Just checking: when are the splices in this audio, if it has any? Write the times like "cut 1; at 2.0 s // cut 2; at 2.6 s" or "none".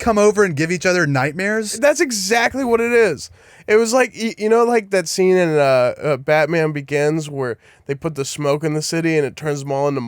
cut 1; at 1.7 s